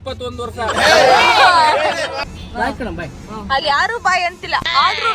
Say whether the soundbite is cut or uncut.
cut